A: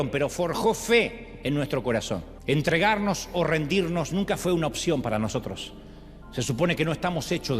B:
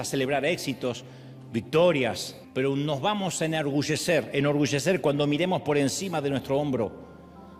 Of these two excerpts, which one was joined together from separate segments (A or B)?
A